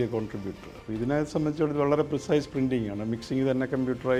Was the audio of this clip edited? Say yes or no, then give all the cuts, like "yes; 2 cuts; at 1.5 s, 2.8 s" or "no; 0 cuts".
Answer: no; 0 cuts